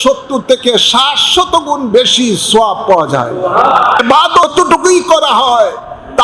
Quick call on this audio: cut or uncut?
cut